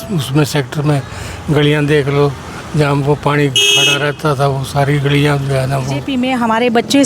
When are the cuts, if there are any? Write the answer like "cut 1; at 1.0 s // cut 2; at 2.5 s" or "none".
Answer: cut 1; at 6.1 s